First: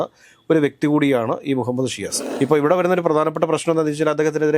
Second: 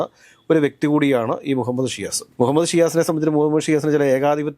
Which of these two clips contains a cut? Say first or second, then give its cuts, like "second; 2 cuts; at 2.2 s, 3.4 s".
first; 1 cut; at 2.3 s